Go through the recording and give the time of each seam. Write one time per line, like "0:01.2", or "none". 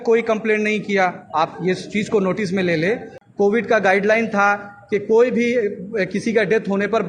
0:03.2